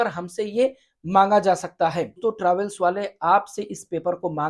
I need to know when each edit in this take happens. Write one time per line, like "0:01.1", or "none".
0:02.2